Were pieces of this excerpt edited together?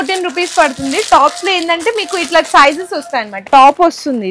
yes; 1 cut; at 3.3 s

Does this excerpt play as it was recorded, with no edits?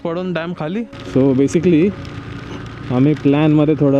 no; 1 cut; at 1.0 s

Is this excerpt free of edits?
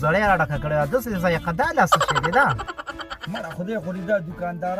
yes; 0 cuts

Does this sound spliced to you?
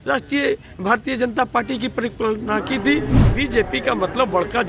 yes; 1 cut; at 3.2 s

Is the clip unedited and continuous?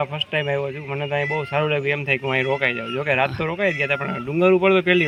yes; 0 cuts

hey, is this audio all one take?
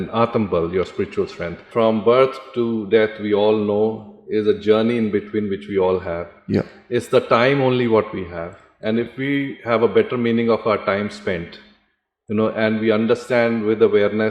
no; 1 cut; at 1.7 s

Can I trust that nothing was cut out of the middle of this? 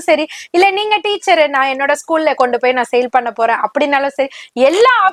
yes; 0 cuts

